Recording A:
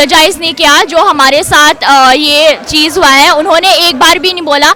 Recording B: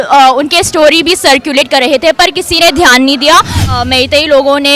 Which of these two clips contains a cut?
B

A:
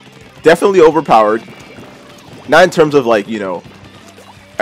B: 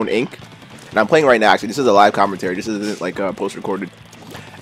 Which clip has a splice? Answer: A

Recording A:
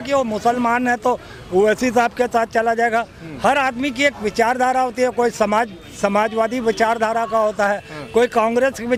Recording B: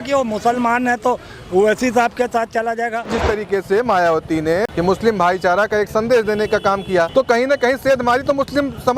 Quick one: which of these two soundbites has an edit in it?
B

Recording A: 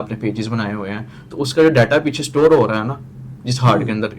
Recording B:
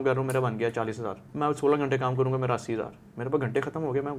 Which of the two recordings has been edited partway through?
B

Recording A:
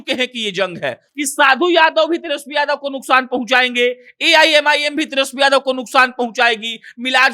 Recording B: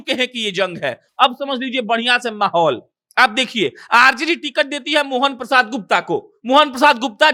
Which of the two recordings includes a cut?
A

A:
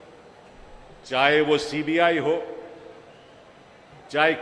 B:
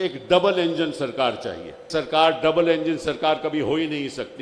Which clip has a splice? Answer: B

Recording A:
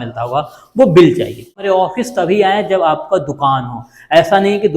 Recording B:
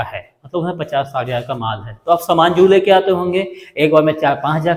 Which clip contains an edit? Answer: A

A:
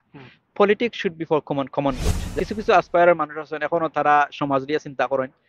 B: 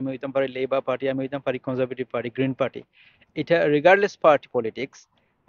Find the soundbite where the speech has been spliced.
A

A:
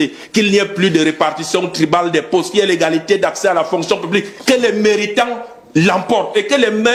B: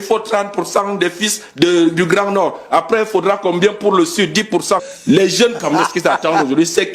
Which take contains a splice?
B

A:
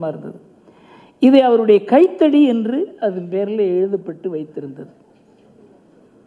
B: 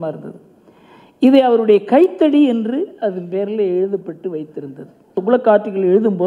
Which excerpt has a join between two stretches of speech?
B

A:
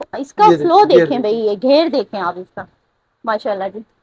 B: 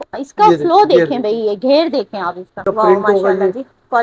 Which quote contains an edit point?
B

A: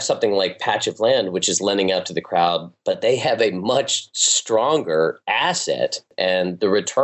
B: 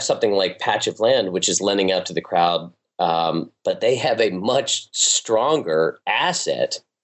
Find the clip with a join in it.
A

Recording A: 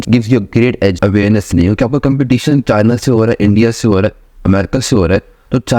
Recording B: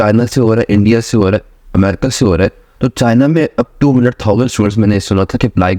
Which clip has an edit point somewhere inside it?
A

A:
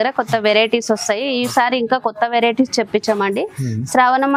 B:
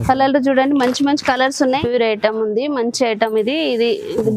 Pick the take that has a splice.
B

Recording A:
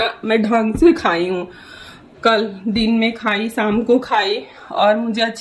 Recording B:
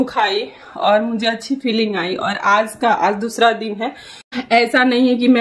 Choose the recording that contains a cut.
B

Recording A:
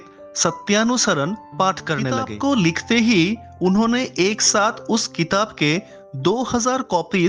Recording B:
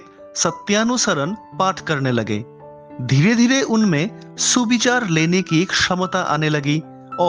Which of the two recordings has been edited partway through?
A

